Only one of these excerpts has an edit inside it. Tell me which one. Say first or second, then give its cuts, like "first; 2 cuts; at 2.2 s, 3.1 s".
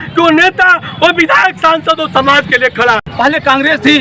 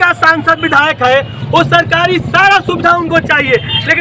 first; 1 cut; at 3.0 s